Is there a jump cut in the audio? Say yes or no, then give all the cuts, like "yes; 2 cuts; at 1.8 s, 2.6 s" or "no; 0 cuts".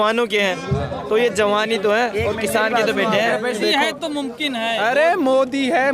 yes; 1 cut; at 3.6 s